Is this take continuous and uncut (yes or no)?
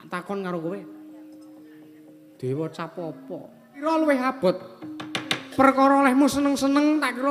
no